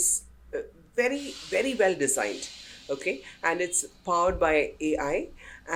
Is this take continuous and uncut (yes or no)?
yes